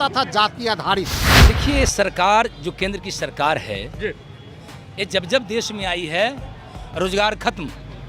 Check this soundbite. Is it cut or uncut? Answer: cut